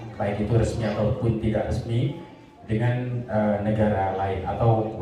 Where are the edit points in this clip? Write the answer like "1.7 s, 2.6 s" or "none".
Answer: none